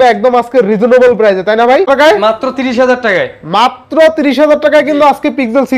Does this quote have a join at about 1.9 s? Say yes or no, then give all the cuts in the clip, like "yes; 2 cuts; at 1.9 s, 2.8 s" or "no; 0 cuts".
yes; 1 cut; at 1.9 s